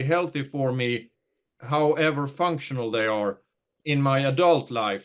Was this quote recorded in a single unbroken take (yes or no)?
no